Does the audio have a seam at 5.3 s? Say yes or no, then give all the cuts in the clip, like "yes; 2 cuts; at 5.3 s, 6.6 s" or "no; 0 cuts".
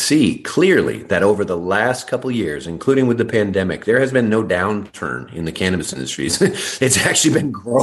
no; 0 cuts